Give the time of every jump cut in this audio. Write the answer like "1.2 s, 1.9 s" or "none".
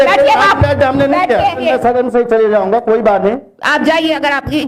1.6 s